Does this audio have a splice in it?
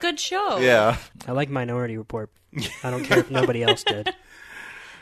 yes; 2 cuts; at 1.1 s, 2.4 s

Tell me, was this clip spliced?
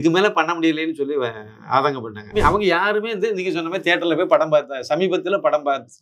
yes; 1 cut; at 2.3 s

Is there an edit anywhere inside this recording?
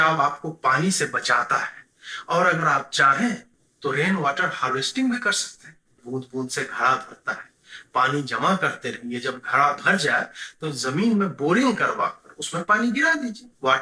yes; 1 cut; at 5.9 s

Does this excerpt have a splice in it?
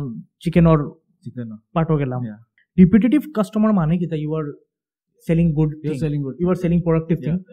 yes; 1 cut; at 2.6 s

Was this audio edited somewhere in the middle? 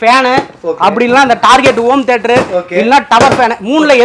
no; 0 cuts

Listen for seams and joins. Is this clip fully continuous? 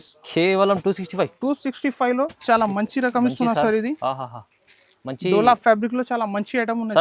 yes; 0 cuts

